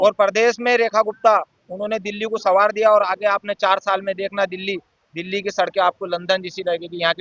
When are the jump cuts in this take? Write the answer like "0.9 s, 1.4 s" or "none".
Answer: none